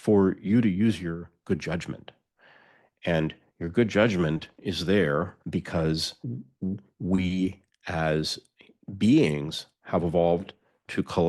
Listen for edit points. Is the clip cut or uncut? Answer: uncut